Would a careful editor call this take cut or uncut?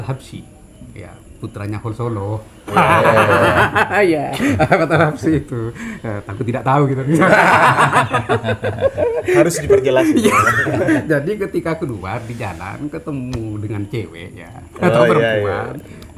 uncut